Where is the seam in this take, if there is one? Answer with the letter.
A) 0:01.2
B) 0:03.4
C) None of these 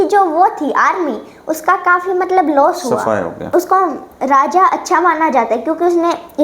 B